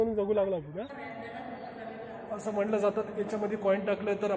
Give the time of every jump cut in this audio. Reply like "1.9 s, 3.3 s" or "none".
0.9 s